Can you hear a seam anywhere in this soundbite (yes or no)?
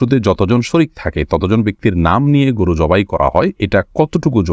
yes